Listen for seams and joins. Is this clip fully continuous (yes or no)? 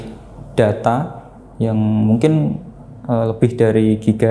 yes